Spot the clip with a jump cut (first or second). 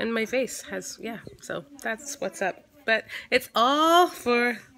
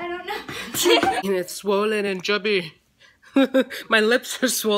second